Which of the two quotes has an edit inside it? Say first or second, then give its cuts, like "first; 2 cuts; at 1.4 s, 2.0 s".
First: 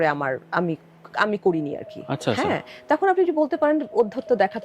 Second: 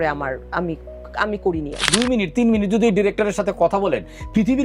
second; 1 cut; at 1.9 s